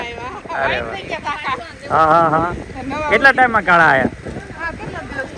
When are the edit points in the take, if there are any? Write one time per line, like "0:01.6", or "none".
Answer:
none